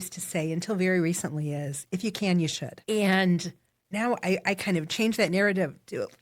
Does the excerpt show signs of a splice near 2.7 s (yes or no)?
yes